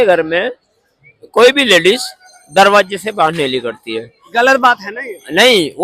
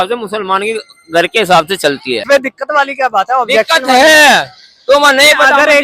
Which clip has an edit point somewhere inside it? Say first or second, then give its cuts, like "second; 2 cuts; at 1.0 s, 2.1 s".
second; 1 cut; at 2.2 s